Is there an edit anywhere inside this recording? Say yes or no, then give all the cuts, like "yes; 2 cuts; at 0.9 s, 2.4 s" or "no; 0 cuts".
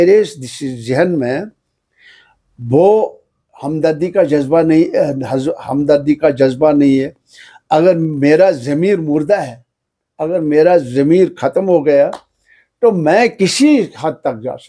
no; 0 cuts